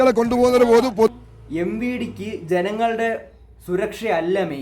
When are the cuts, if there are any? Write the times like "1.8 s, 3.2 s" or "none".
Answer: 1.1 s